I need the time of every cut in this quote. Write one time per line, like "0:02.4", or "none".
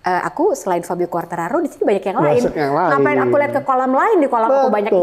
none